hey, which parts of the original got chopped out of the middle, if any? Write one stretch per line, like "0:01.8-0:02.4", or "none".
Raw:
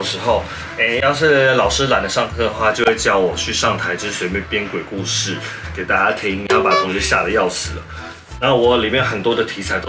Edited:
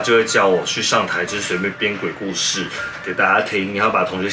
none